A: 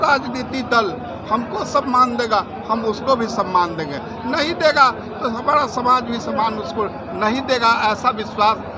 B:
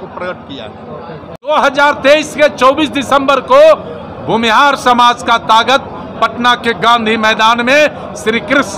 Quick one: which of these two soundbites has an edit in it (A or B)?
B